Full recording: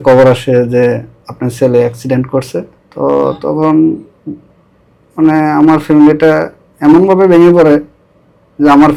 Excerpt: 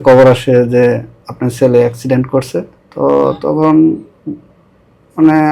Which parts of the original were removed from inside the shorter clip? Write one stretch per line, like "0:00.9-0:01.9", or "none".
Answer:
none

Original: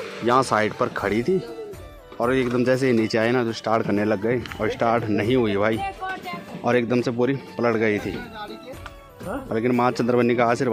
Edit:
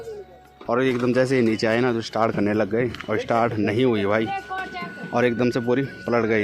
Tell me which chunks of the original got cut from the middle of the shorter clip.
none

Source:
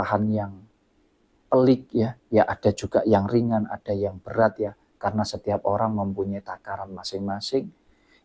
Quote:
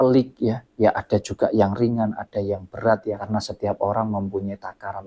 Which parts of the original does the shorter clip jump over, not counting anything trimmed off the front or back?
0:04.8-0:05.1

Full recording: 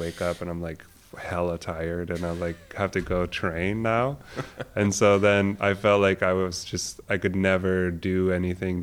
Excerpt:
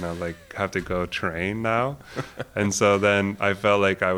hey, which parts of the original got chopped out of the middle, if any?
none

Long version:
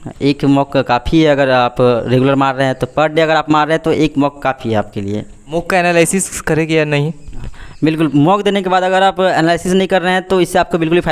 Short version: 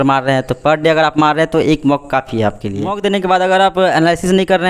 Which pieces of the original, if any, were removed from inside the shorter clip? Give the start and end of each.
0:05.3-0:08.4

